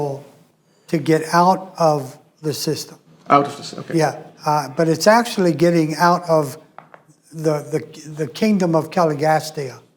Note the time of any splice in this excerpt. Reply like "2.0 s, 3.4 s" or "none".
4.3 s